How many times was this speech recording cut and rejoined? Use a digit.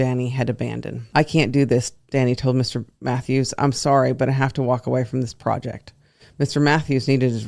1